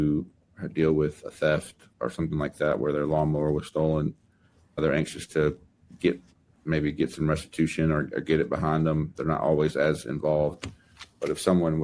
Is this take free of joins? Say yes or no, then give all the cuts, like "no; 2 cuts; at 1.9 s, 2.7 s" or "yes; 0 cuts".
no; 2 cuts; at 1.9 s, 4.8 s